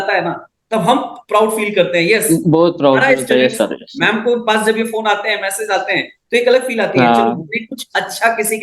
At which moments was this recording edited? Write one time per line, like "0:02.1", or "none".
none